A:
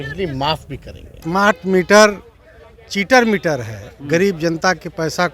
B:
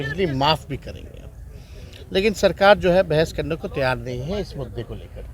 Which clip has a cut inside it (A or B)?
A